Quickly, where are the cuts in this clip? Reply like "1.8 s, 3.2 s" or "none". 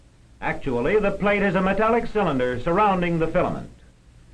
2.6 s